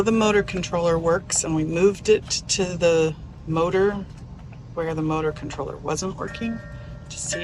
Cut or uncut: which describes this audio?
uncut